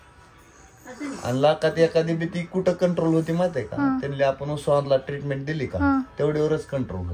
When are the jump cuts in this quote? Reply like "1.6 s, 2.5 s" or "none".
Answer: none

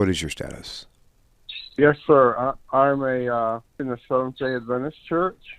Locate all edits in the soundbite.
3.7 s

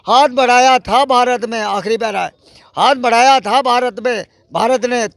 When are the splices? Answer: none

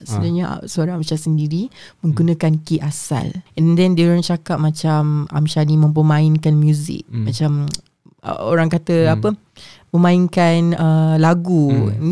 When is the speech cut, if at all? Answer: 3.4 s

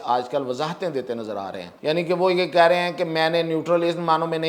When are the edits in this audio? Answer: 1.7 s

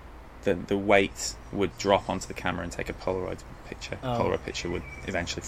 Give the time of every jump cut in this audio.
4.1 s

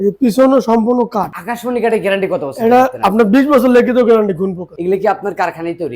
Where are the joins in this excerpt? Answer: 1.4 s, 4.7 s

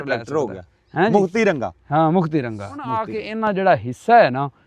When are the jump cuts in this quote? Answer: 2.9 s

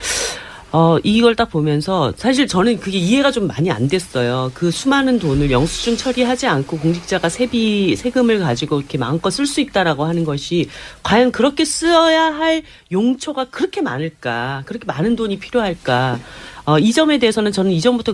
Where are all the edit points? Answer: 9.8 s

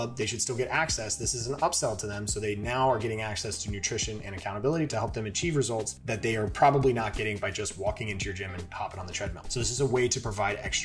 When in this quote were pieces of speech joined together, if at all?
9.4 s

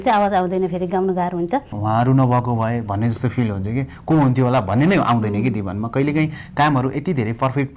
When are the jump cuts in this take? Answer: 1.7 s

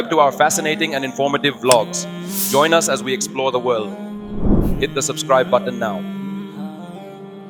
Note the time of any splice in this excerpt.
none

